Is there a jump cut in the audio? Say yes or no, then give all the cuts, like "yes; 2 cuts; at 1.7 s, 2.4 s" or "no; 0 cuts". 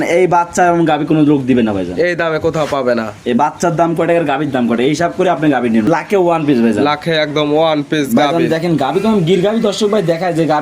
yes; 1 cut; at 5.9 s